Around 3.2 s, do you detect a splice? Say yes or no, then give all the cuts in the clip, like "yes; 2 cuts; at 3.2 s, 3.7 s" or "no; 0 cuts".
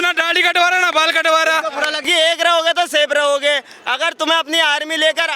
no; 1 cut; at 2.0 s